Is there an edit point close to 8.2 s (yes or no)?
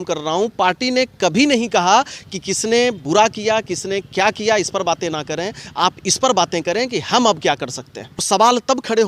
yes